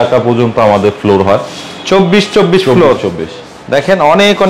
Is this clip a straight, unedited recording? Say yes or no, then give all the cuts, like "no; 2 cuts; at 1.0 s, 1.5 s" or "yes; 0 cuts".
yes; 0 cuts